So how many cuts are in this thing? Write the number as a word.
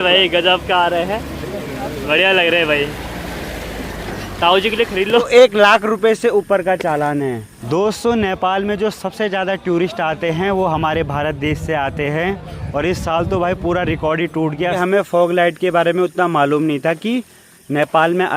three